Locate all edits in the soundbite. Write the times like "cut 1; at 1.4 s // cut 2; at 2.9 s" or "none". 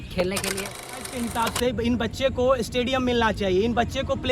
cut 1; at 1.0 s

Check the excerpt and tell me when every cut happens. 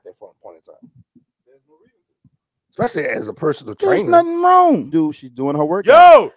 cut 1; at 4.9 s

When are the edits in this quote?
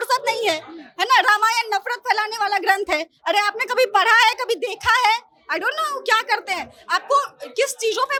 none

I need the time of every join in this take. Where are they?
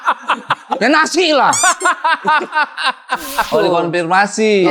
cut 1; at 3.5 s

